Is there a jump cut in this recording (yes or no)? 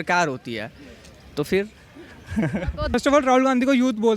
yes